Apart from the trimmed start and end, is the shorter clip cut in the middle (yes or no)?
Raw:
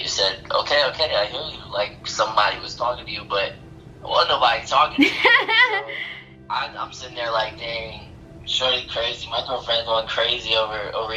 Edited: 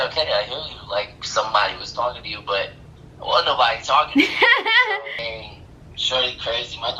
yes